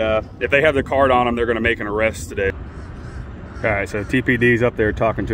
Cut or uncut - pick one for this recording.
cut